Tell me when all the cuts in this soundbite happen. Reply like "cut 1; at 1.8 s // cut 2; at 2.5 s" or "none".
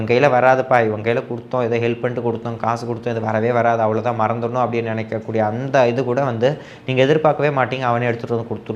none